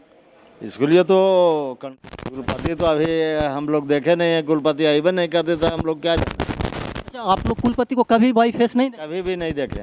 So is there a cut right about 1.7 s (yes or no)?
yes